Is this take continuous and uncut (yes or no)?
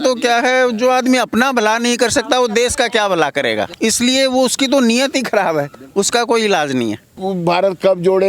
no